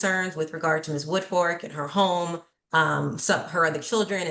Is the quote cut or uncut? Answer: uncut